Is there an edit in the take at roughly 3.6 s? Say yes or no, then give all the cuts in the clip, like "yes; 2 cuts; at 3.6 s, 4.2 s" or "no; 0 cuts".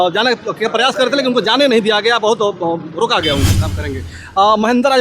yes; 1 cut; at 3.6 s